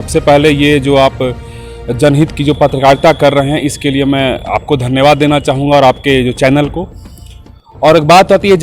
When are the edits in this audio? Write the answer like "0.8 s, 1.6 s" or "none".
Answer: none

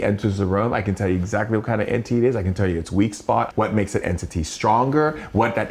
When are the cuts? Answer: 3.5 s

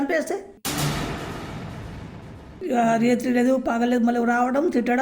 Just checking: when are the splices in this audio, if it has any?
2.6 s

